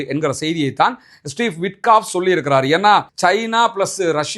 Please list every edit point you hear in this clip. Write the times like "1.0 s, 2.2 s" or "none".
3.1 s

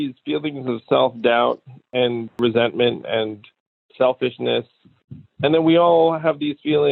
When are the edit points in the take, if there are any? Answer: none

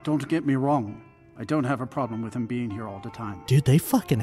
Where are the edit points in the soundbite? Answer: 3.3 s

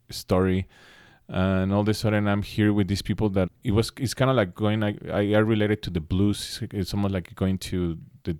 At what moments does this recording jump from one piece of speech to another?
3.6 s

